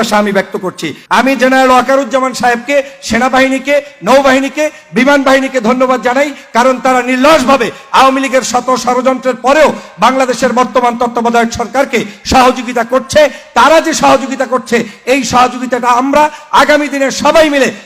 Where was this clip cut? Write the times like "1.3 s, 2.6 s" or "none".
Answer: 1.0 s

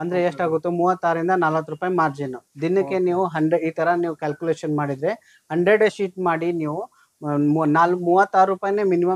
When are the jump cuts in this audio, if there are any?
none

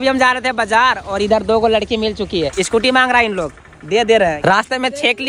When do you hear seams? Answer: 2.6 s, 4.4 s

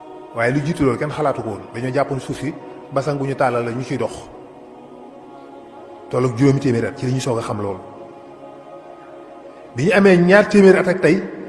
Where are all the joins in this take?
7.8 s, 9.7 s

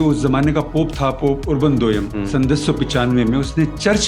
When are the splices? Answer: 2.1 s

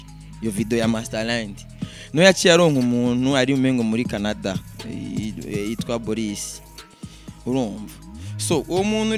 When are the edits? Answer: none

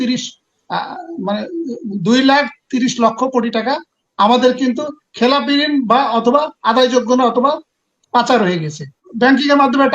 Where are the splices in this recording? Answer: 9.0 s

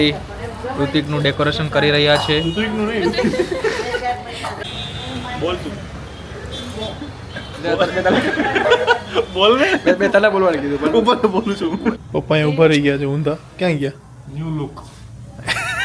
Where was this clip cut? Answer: 4.6 s, 12.0 s

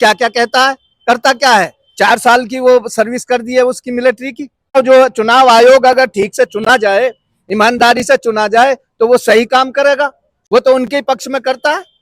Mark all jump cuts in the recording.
4.8 s

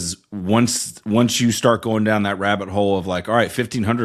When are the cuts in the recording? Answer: none

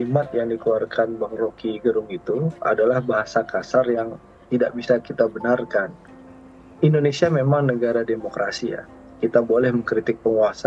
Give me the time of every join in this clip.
none

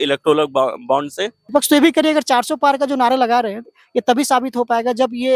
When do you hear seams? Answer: 1.3 s

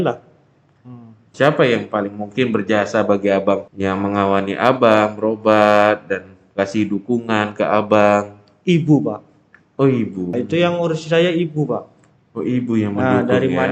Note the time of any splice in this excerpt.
1.2 s, 3.7 s, 10.3 s

